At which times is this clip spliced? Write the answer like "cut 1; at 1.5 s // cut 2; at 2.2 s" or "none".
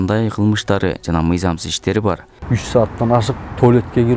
cut 1; at 2.3 s